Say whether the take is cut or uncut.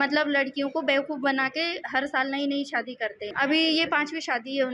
cut